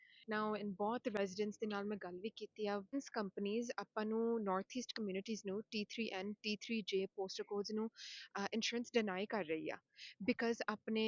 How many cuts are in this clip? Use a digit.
1